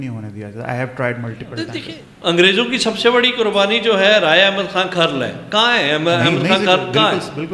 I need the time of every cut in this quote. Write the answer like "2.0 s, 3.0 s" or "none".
1.7 s